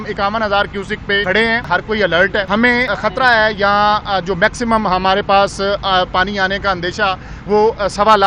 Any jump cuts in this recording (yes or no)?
yes